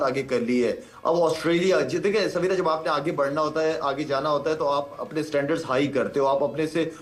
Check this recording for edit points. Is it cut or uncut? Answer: uncut